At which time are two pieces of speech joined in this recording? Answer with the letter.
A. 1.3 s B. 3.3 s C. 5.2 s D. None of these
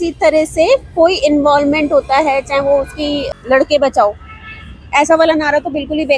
B